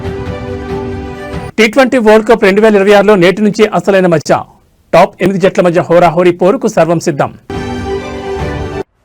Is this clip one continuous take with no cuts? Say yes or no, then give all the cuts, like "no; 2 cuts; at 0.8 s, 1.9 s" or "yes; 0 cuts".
yes; 0 cuts